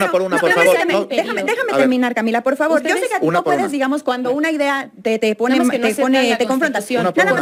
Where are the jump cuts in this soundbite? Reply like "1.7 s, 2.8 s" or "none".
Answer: none